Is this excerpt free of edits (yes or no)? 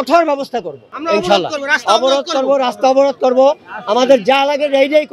yes